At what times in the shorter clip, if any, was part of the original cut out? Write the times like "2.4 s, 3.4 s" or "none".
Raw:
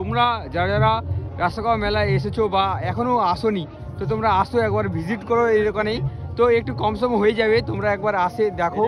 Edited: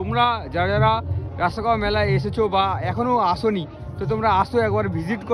none